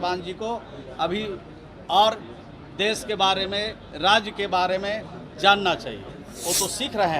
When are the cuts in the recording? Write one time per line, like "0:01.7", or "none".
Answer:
0:06.2